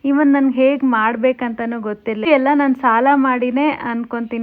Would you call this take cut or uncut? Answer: cut